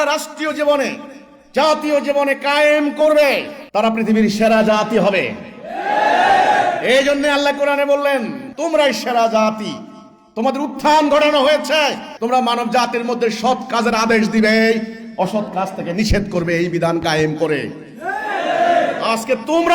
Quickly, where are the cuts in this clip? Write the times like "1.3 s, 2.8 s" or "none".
3.6 s, 8.4 s, 12.1 s